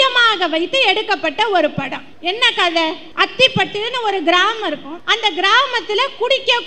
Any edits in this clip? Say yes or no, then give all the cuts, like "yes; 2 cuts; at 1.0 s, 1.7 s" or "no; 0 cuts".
yes; 3 cuts; at 2.1 s, 3.0 s, 4.9 s